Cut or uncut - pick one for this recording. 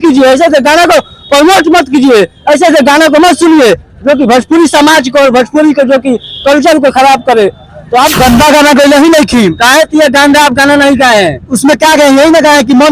cut